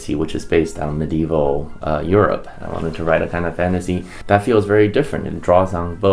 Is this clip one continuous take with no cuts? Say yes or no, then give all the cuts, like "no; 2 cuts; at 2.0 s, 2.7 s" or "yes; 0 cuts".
no; 2 cuts; at 2.5 s, 4.1 s